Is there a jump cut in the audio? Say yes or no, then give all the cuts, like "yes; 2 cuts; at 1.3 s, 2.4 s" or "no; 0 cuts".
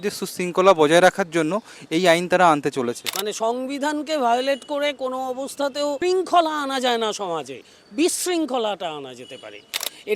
yes; 2 cuts; at 3.1 s, 6.0 s